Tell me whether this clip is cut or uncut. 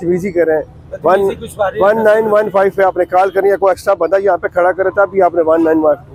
uncut